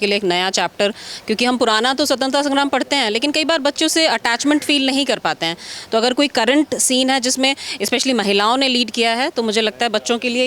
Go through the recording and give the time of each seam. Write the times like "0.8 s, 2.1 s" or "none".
none